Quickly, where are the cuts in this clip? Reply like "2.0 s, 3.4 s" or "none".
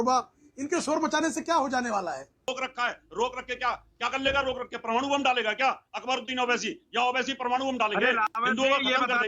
2.5 s